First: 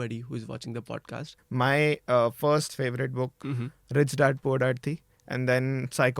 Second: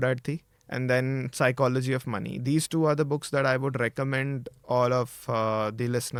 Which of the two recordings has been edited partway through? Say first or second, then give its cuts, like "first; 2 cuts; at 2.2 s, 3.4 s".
first; 2 cuts; at 1.3 s, 3.4 s